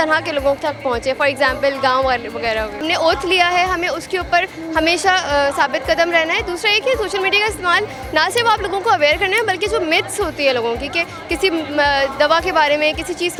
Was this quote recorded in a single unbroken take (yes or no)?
yes